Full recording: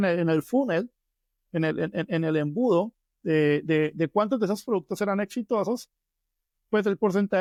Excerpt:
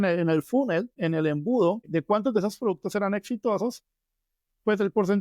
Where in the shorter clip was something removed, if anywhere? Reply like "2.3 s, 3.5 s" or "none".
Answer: 1.0 s, 1.9 s